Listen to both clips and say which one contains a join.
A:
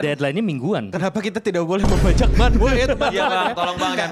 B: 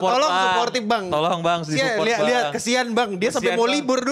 A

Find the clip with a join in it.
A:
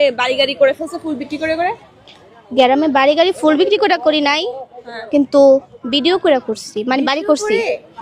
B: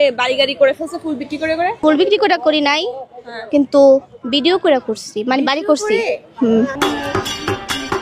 B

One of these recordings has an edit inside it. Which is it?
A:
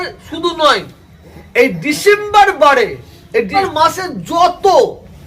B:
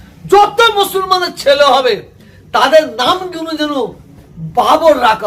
A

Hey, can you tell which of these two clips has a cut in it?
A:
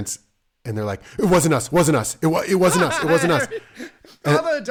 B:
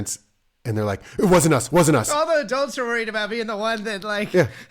B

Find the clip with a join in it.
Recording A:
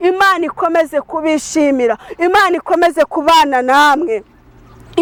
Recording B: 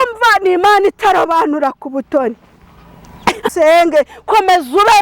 B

